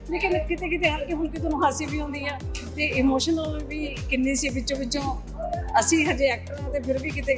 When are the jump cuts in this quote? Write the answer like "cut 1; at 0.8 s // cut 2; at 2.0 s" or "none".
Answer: none